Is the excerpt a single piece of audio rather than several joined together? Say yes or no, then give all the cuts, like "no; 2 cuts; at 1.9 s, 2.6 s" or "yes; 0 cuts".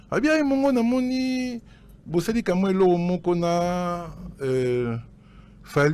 yes; 0 cuts